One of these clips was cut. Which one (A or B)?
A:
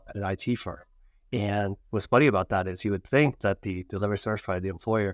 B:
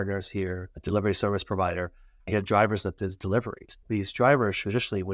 B